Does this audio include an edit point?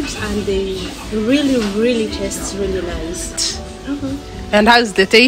yes; 1 cut; at 3.3 s

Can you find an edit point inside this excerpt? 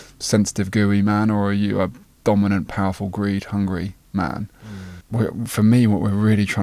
yes; 1 cut; at 4.5 s

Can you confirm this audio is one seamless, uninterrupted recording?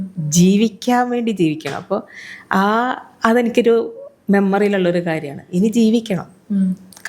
yes; 0 cuts

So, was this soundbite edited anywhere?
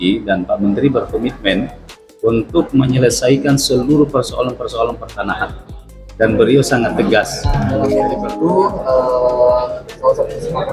yes; 1 cut; at 7.9 s

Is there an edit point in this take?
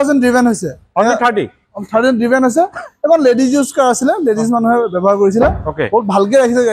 no; 0 cuts

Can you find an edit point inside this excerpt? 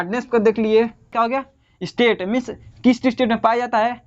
yes; 1 cut; at 1.0 s

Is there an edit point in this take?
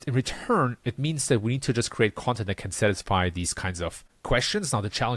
yes; 1 cut; at 4.1 s

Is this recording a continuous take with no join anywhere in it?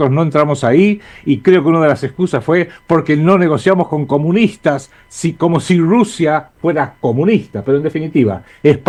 yes; 0 cuts

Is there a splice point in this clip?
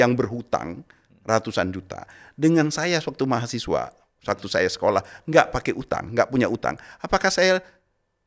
no; 0 cuts

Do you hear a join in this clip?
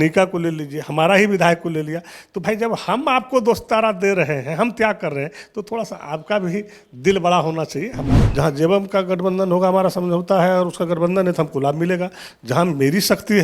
yes; 1 cut; at 8.2 s

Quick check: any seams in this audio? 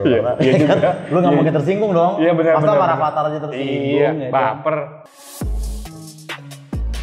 yes; 1 cut; at 5.0 s

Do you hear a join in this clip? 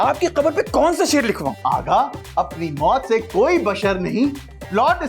yes; 1 cut; at 1.5 s

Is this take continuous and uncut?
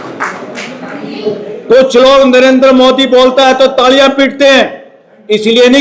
yes; 0 cuts

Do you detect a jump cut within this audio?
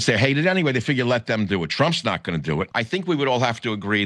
yes; 1 cut; at 2.8 s

